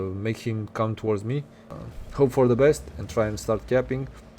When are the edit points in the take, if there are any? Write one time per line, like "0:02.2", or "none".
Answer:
0:01.7